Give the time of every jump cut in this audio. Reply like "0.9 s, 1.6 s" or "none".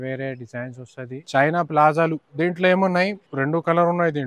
1.2 s, 2.2 s, 3.2 s